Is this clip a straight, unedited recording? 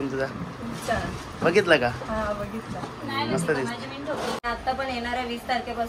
no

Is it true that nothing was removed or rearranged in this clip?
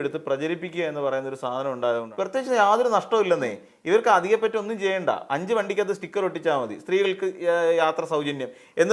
no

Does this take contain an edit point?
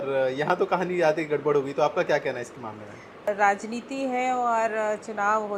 no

